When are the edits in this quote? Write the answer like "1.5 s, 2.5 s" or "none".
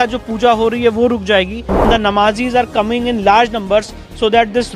1.8 s